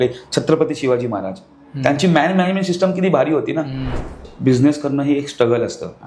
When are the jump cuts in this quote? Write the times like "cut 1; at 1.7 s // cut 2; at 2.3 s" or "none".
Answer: cut 1; at 4.1 s